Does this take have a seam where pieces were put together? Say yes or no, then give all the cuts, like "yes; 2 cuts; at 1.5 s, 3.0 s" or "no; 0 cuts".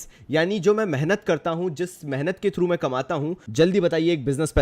yes; 1 cut; at 3.4 s